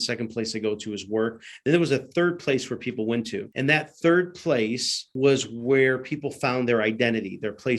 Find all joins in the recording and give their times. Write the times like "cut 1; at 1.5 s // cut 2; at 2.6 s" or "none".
cut 1; at 3.5 s // cut 2; at 5.1 s